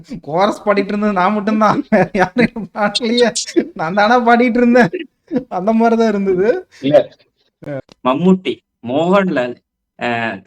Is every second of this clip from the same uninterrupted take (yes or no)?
no